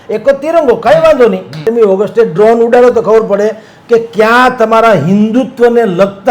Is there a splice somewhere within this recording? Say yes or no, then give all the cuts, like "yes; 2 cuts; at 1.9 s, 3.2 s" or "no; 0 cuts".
yes; 1 cut; at 1.7 s